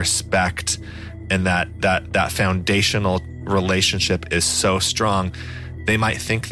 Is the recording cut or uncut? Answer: uncut